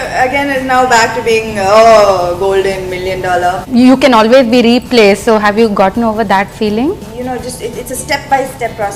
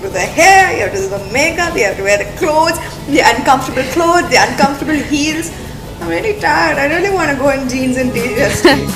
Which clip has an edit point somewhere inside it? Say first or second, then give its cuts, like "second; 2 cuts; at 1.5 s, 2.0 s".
first; 2 cuts; at 3.6 s, 7.1 s